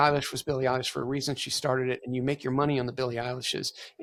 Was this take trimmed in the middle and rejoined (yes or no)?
no